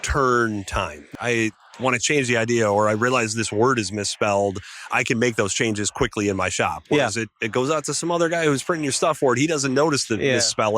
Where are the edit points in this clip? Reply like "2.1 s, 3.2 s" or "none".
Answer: 1.0 s